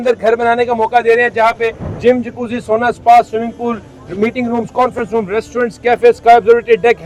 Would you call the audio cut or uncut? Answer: uncut